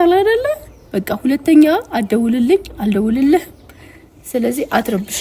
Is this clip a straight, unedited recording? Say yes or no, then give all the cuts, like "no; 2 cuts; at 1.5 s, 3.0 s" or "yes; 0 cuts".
yes; 0 cuts